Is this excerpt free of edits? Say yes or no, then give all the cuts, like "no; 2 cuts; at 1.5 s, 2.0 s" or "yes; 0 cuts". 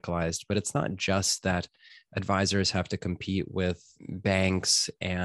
no; 1 cut; at 3.9 s